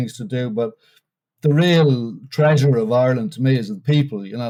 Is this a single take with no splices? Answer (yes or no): yes